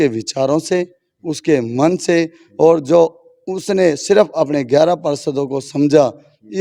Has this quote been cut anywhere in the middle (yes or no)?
no